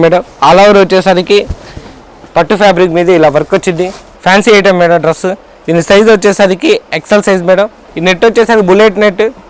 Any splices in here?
yes; 2 cuts; at 4.1 s, 7.8 s

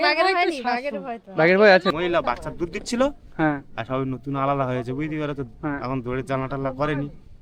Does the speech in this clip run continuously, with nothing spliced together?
no; 1 cut; at 1.9 s

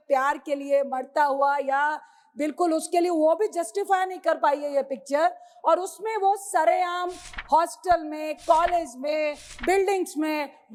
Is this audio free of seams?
yes; 0 cuts

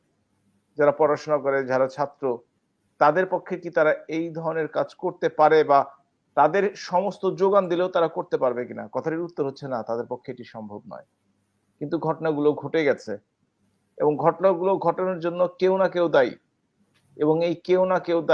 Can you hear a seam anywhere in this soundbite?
no; 0 cuts

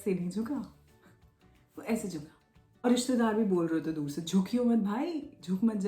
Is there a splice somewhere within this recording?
yes; 1 cut; at 2.8 s

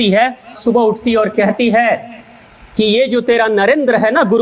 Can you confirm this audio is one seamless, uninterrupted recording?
yes; 0 cuts

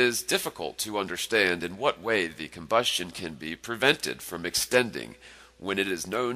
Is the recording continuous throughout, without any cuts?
yes; 0 cuts

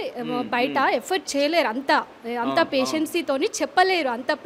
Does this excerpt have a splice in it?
no; 0 cuts

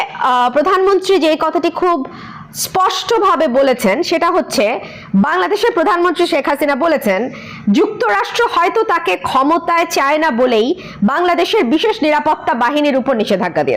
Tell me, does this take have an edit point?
no; 0 cuts

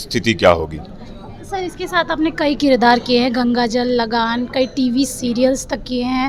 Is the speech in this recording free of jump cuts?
yes; 0 cuts

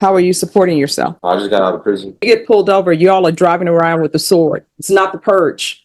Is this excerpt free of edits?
no; 3 cuts; at 1.2 s, 2.2 s, 4.7 s

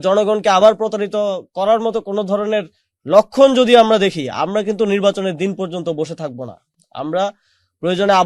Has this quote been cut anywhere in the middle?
no; 0 cuts

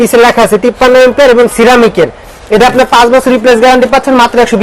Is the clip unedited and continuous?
yes; 0 cuts

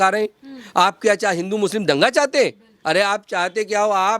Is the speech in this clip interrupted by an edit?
yes; 1 cut; at 2.7 s

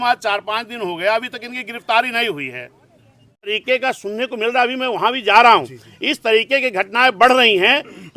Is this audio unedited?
no; 1 cut; at 3.6 s

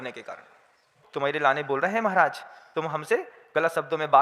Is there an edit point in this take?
yes; 1 cut; at 1.0 s

